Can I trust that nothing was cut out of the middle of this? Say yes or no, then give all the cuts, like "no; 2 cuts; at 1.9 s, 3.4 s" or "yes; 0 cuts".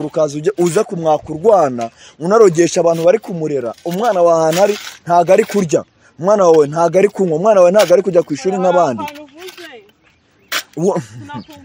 yes; 0 cuts